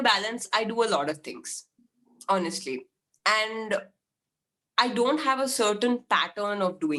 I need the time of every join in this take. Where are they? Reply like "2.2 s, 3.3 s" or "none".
none